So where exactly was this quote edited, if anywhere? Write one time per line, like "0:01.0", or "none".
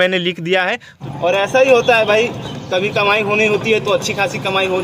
0:01.0